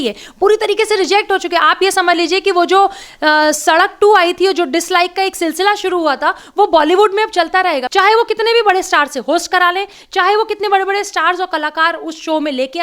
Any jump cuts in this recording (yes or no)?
yes